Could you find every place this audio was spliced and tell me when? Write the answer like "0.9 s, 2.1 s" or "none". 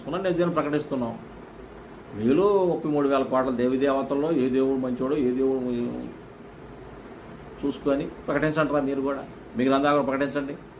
none